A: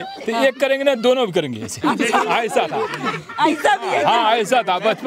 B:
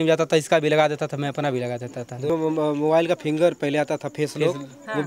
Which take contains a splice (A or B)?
B